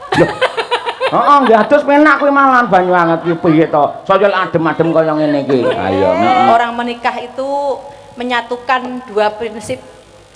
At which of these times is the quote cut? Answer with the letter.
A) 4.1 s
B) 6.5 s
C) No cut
B